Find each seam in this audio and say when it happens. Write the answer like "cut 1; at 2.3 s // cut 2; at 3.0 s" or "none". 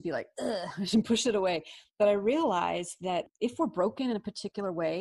cut 1; at 3.3 s